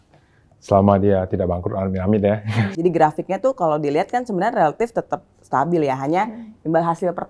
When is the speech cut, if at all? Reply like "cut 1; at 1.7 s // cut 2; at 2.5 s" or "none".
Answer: cut 1; at 2.8 s